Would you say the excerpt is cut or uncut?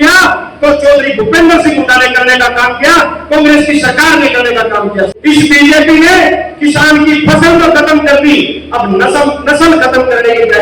cut